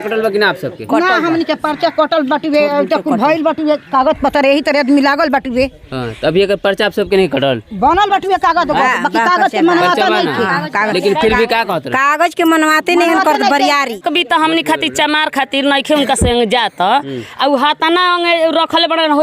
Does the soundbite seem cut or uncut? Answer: cut